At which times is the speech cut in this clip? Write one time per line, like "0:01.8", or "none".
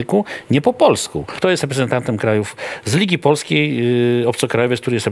0:01.3